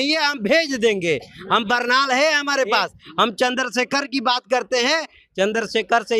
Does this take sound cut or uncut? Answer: uncut